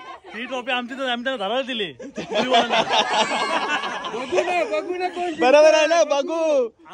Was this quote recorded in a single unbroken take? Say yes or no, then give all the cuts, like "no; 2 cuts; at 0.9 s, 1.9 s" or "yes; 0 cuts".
yes; 0 cuts